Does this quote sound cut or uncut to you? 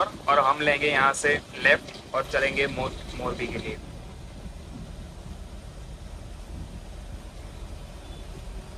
uncut